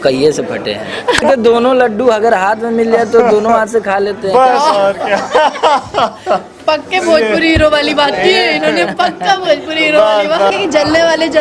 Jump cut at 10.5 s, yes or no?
yes